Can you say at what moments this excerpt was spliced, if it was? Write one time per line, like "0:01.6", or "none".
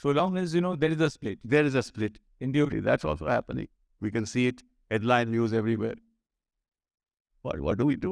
0:02.7